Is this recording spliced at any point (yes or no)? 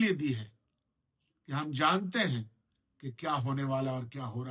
no